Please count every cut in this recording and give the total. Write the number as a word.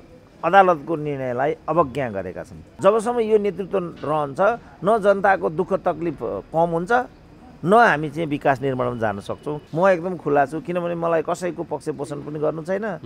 two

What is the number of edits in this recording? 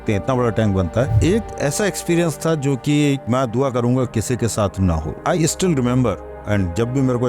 two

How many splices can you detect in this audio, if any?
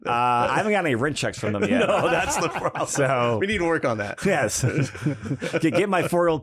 zero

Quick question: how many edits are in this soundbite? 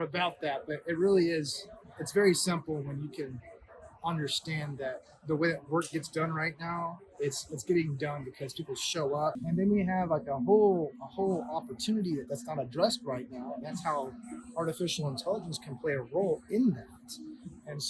one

